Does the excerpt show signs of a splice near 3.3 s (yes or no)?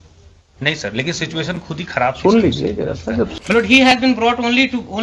yes